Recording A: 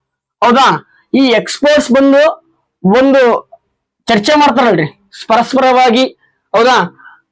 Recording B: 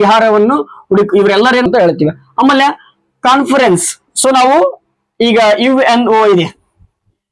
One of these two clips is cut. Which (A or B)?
B